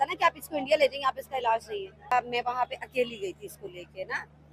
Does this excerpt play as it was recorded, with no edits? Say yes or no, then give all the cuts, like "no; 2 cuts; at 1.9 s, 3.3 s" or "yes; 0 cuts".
no; 1 cut; at 2.1 s